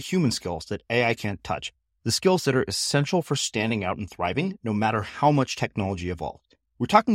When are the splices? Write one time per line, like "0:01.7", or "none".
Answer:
none